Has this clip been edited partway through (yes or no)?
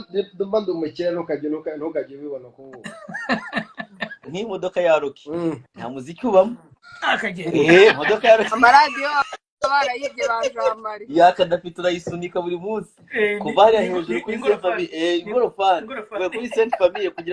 yes